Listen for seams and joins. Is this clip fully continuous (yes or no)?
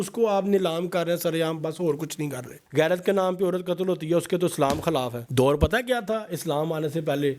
yes